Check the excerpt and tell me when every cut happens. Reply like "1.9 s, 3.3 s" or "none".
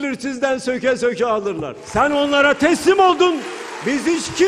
1.7 s